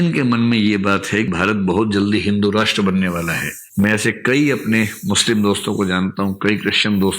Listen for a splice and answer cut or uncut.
cut